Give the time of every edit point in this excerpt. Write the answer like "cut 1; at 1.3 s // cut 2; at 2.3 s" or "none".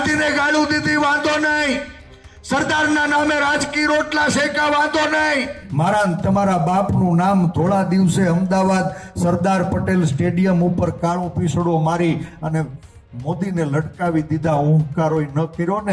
cut 1; at 5.6 s